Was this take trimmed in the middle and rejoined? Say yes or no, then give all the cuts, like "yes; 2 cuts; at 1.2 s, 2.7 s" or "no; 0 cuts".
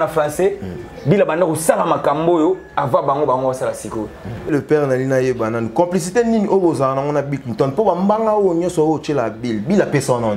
yes; 1 cut; at 4.5 s